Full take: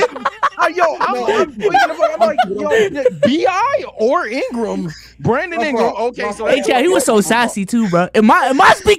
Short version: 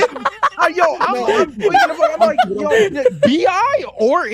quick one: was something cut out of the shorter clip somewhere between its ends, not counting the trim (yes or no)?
no